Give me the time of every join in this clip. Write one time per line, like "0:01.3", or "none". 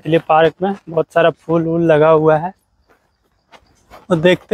none